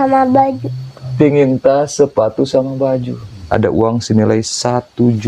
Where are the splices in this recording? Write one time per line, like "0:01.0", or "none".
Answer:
0:03.5